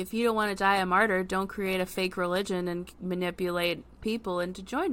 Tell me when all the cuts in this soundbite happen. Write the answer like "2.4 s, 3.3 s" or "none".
3.9 s